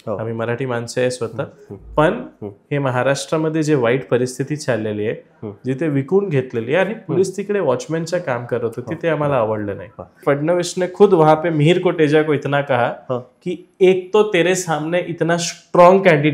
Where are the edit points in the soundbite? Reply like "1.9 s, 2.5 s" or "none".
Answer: 10.2 s